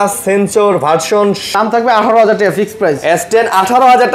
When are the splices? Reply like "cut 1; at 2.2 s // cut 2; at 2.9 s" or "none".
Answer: cut 1; at 1.4 s

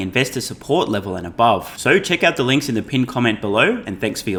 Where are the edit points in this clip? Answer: none

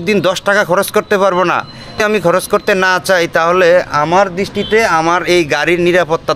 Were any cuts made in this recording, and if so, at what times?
cut 1; at 2.0 s

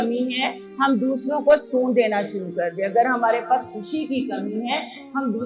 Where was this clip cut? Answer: none

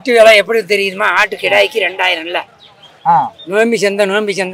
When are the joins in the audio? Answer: none

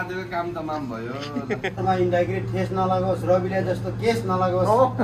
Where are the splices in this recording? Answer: cut 1; at 1.8 s

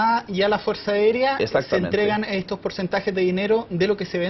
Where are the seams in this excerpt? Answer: cut 1; at 2.2 s

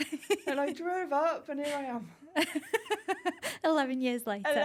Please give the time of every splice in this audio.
none

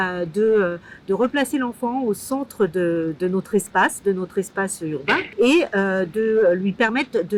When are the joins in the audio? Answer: none

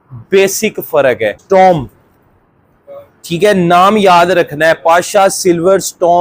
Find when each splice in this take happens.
cut 1; at 1.4 s

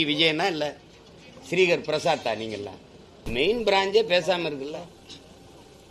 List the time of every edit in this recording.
cut 1; at 3.2 s

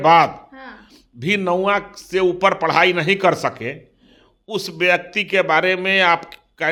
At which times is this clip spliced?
none

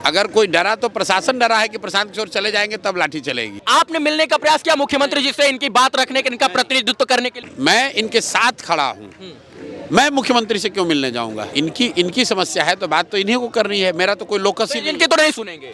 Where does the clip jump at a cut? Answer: cut 1; at 3.6 s // cut 2; at 7.4 s // cut 3; at 11.5 s

